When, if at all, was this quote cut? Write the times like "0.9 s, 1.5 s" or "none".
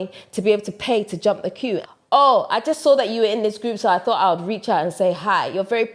1.8 s